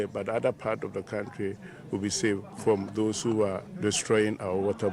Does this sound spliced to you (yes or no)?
yes